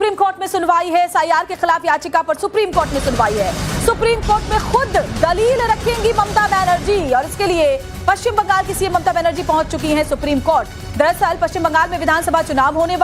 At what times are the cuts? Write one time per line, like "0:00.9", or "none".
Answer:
0:09.6